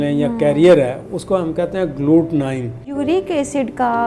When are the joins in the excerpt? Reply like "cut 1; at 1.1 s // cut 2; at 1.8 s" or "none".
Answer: cut 1; at 2.9 s